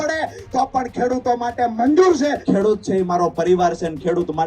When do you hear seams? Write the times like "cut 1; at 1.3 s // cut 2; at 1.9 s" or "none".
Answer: cut 1; at 2.4 s

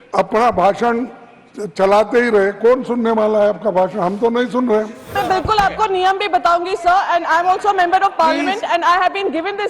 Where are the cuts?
cut 1; at 5.1 s

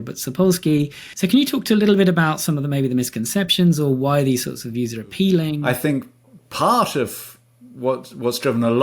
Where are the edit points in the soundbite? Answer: cut 1; at 1.0 s // cut 2; at 5.6 s

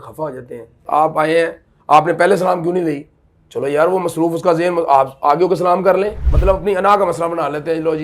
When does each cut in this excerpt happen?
cut 1; at 0.9 s // cut 2; at 6.2 s

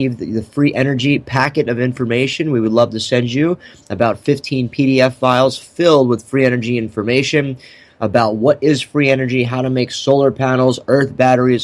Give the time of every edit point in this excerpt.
none

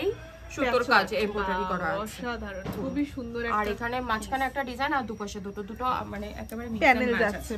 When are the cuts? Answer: none

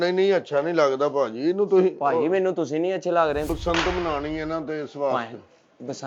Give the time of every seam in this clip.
cut 1; at 3.5 s

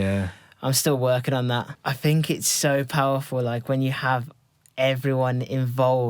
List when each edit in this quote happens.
cut 1; at 1.7 s

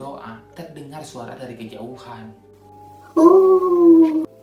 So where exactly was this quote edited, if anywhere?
none

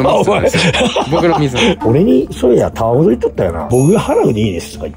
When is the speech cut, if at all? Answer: cut 1; at 1.8 s // cut 2; at 3.6 s

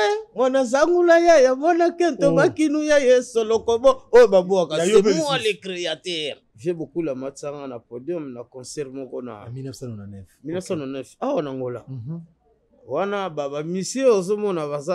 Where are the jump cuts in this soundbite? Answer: cut 1; at 6.4 s

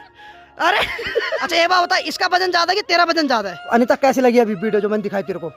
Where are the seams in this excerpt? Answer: cut 1; at 1.4 s // cut 2; at 3.6 s

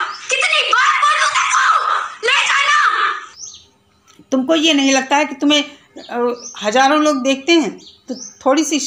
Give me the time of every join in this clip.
cut 1; at 3.3 s

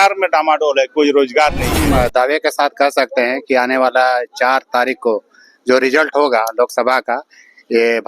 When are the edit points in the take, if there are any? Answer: cut 1; at 1.7 s

